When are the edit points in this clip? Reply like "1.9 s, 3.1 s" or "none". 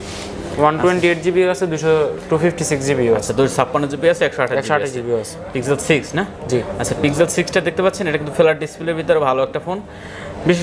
none